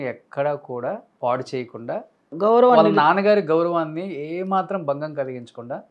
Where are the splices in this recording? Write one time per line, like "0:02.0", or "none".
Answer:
0:01.1
0:02.3